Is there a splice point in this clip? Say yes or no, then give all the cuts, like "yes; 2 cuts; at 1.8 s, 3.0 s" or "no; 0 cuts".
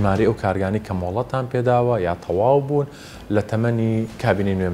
no; 0 cuts